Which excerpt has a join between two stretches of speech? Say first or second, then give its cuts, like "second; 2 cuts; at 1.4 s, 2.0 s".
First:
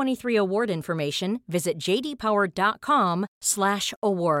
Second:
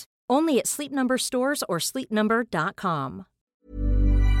second; 1 cut; at 3.5 s